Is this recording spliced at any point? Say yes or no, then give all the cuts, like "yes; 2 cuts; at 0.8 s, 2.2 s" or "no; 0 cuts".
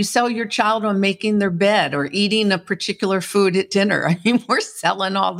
no; 0 cuts